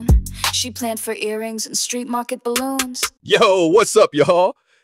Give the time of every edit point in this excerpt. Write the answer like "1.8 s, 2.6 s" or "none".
3.1 s